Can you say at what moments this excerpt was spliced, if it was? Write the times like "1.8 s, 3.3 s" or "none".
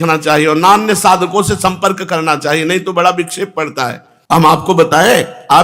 4.1 s